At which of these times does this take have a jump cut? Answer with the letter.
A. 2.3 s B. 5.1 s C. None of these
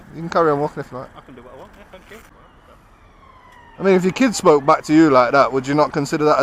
A